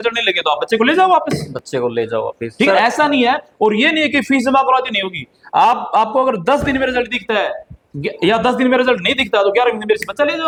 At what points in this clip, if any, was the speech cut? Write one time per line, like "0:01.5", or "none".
none